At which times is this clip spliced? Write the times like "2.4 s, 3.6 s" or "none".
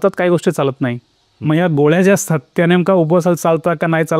none